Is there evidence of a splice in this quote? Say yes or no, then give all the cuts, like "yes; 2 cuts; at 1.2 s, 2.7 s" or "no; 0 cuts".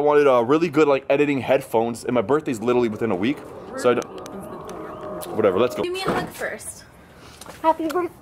no; 0 cuts